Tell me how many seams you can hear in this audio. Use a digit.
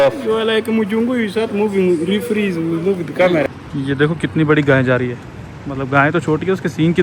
1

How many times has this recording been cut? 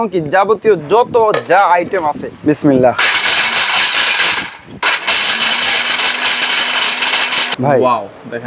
2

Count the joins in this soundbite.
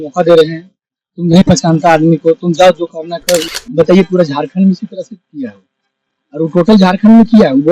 1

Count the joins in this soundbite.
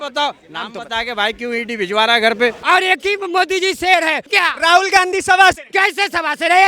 3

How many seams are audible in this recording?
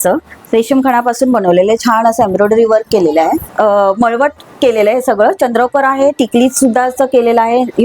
1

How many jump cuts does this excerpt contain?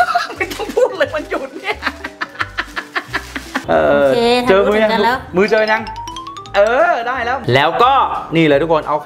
1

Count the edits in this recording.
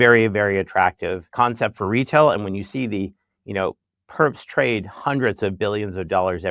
1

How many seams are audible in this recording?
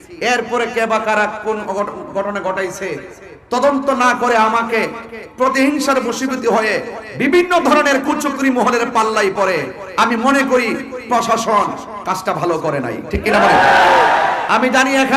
0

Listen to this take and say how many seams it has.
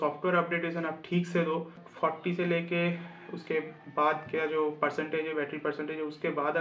1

